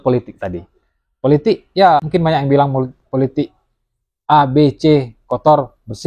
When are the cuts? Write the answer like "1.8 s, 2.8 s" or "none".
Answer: 2.1 s